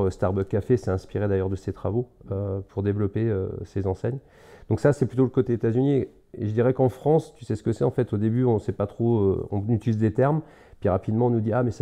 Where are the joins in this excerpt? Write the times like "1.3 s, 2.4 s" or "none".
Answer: none